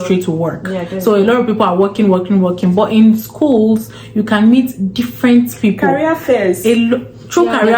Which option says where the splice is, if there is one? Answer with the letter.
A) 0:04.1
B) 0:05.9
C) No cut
C